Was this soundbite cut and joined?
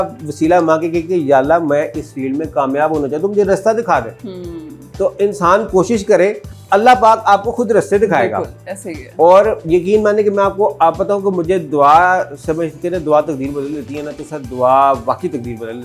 no; 0 cuts

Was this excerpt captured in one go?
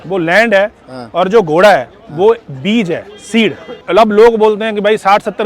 no; 1 cut; at 3.7 s

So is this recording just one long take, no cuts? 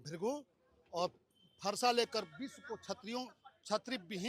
yes; 0 cuts

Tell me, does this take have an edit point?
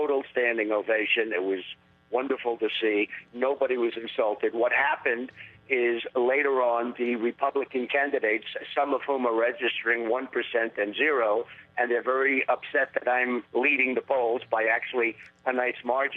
yes; 1 cut; at 2.6 s

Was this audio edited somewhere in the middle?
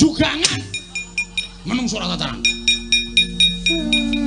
no; 0 cuts

